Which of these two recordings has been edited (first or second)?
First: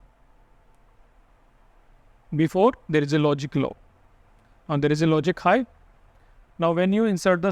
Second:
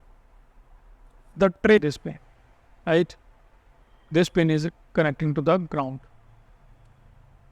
second